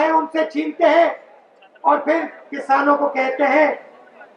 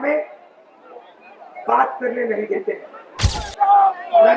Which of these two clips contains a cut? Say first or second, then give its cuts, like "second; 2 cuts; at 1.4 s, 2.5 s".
second; 1 cut; at 3.4 s